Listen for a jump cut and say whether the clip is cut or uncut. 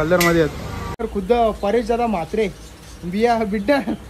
cut